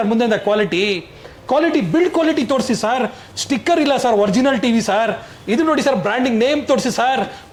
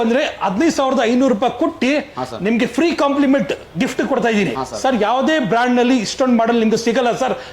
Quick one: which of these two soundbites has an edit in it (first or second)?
second